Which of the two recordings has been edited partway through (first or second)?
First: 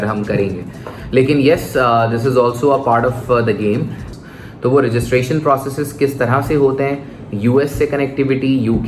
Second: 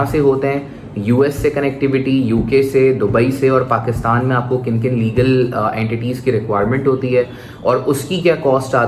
first